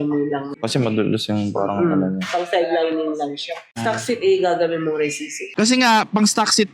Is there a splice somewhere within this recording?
yes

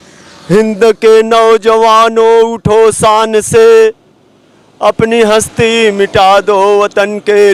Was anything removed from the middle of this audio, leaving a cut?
no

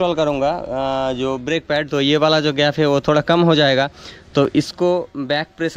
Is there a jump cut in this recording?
no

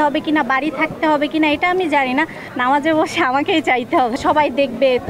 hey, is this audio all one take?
no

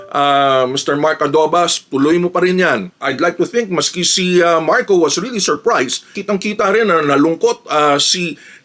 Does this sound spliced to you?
yes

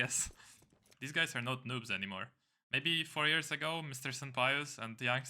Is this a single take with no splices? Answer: no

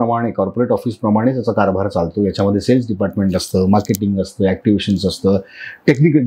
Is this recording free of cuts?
yes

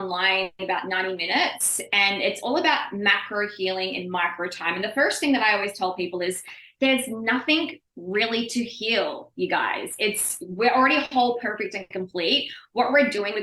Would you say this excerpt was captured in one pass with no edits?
yes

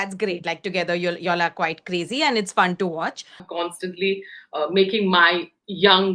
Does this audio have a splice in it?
yes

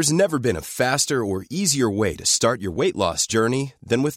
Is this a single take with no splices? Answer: yes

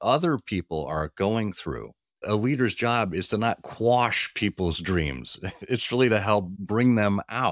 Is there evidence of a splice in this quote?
yes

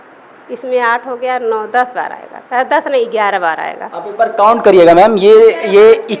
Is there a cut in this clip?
no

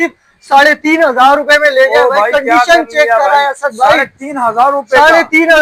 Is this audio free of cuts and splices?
yes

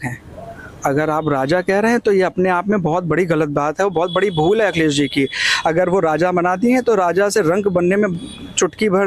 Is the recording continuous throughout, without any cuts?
yes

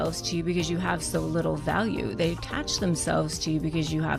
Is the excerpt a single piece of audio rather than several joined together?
yes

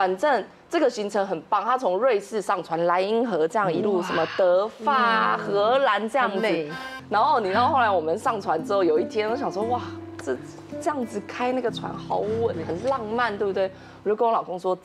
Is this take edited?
yes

